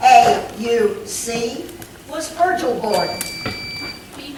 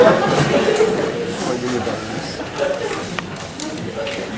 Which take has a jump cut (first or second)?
second